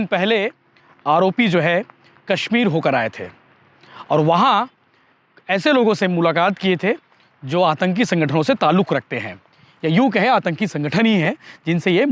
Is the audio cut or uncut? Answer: uncut